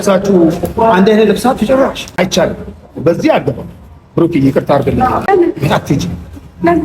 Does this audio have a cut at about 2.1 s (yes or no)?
yes